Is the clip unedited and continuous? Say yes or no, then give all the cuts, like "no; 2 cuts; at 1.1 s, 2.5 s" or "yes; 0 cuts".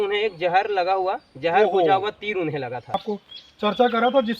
no; 1 cut; at 2.9 s